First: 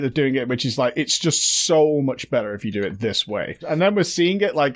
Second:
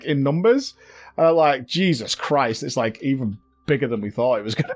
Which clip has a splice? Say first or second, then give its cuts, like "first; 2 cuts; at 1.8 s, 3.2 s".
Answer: first; 1 cut; at 3.6 s